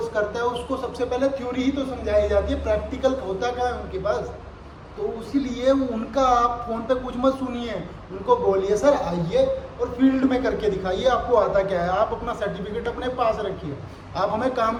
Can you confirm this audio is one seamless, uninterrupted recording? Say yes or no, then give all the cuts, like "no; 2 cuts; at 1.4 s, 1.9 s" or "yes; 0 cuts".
yes; 0 cuts